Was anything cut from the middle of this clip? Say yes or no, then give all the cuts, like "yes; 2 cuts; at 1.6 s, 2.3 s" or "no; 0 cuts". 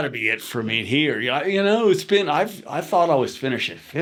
no; 0 cuts